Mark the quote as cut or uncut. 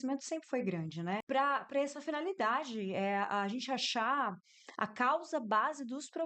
cut